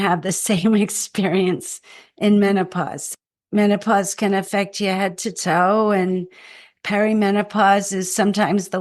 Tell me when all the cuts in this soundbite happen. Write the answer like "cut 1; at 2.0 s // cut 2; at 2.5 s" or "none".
cut 1; at 3.1 s